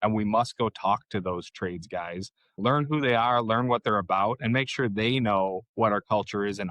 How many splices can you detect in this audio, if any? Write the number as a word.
one